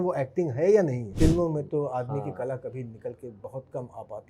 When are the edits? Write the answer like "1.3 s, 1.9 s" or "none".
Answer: 1.1 s